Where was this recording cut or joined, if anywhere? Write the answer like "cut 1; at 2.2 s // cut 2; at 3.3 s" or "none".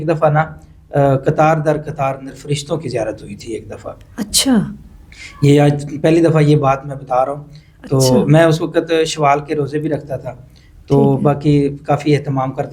none